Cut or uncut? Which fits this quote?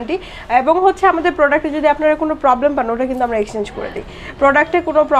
uncut